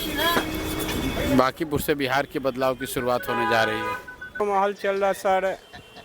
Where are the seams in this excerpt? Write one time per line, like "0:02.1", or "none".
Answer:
0:04.4